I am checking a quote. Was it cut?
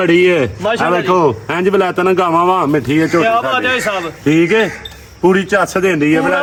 no; 0 cuts

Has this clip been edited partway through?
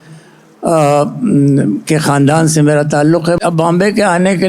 yes; 1 cut; at 3.4 s

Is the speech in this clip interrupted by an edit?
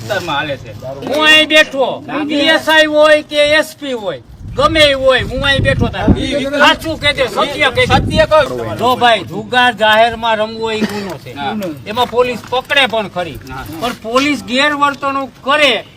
yes; 2 cuts; at 1.0 s, 8.5 s

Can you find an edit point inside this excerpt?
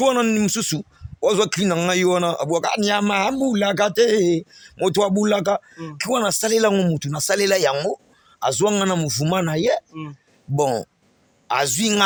no; 0 cuts

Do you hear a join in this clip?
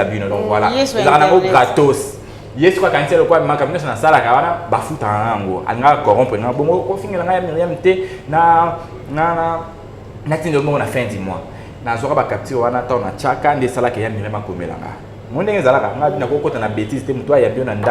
no; 0 cuts

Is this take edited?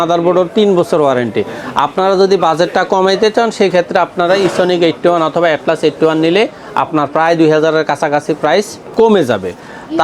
no; 0 cuts

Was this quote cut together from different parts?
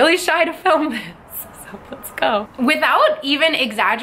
yes; 1 cut; at 2.5 s

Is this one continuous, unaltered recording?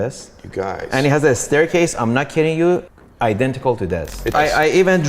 no; 2 cuts; at 3.0 s, 4.3 s

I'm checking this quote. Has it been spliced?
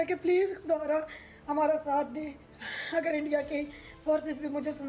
no; 0 cuts

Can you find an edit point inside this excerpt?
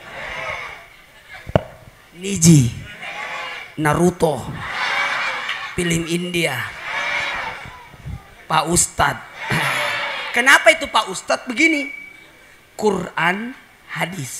no; 0 cuts

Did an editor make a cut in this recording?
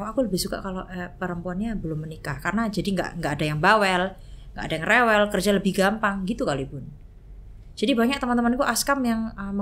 no; 0 cuts

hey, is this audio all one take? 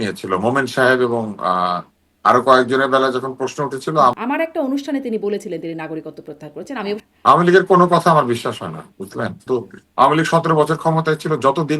no; 3 cuts; at 4.2 s, 7.0 s, 9.4 s

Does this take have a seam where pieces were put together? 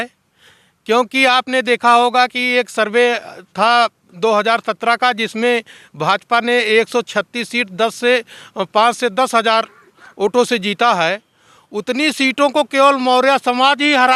no; 0 cuts

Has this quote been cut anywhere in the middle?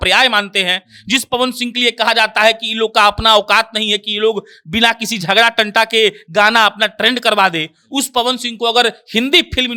no; 0 cuts

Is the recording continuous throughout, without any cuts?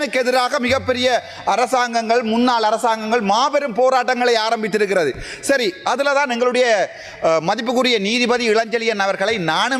yes; 0 cuts

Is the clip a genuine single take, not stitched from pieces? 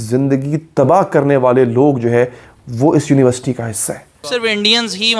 no; 1 cut; at 4.2 s

